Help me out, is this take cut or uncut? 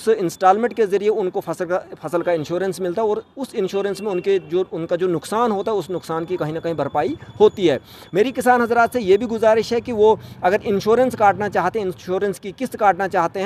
uncut